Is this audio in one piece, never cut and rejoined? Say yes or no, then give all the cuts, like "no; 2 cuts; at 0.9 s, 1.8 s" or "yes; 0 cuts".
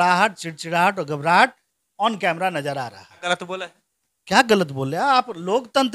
no; 1 cut; at 3.1 s